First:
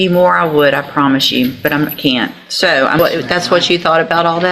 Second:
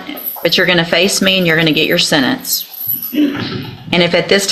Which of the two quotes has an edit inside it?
first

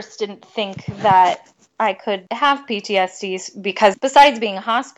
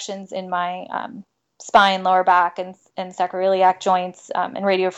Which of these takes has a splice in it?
first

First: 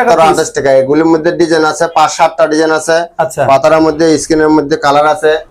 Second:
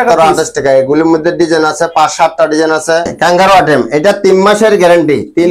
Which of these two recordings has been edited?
second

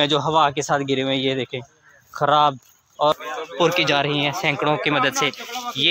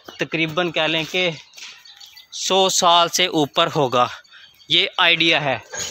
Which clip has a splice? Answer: first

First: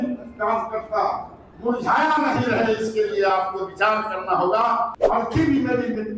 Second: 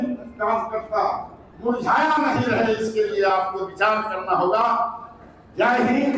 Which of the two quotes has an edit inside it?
first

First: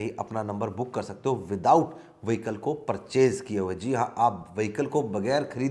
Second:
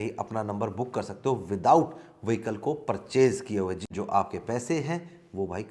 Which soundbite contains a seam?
second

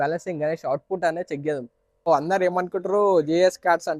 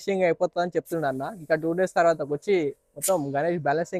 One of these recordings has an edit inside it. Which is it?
first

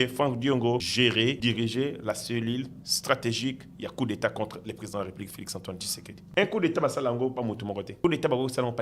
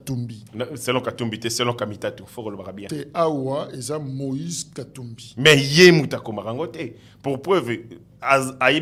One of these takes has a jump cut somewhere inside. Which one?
first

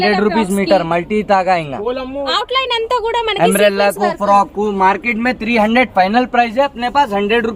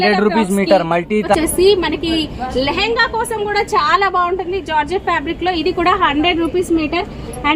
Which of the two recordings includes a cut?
second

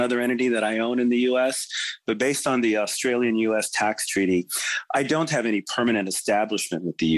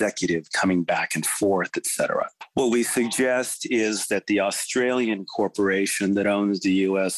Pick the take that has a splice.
second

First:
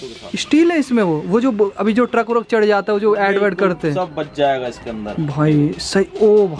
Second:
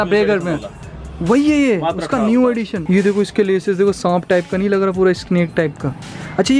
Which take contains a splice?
second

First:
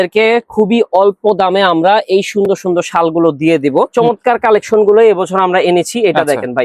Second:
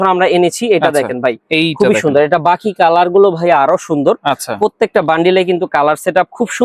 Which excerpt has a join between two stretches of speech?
first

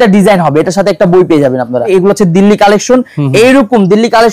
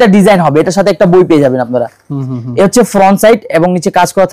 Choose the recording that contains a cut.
first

